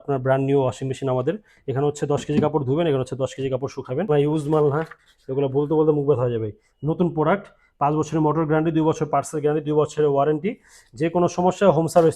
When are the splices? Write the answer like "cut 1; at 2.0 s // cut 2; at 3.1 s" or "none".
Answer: cut 1; at 4.1 s